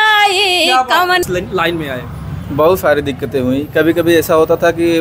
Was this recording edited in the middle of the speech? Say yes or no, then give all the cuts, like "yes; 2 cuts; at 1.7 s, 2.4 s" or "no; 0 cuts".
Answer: yes; 1 cut; at 1.2 s